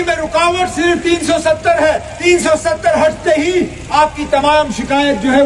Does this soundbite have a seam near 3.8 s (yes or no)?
yes